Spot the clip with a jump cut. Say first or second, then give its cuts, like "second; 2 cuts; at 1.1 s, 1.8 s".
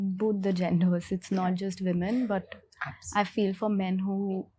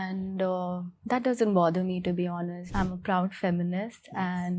second; 1 cut; at 2.6 s